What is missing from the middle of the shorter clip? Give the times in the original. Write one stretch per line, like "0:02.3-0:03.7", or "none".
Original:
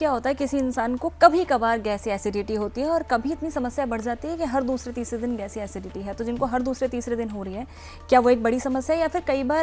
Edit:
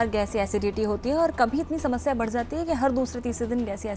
none